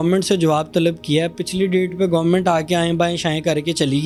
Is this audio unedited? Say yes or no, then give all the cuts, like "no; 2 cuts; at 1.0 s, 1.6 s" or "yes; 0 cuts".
yes; 0 cuts